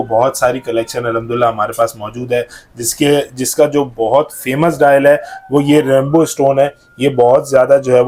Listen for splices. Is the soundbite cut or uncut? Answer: uncut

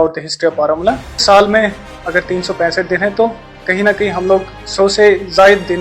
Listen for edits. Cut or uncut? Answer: cut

